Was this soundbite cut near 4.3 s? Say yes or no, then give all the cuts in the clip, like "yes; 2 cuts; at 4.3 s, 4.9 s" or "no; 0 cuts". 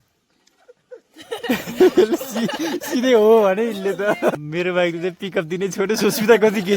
yes; 1 cut; at 4.3 s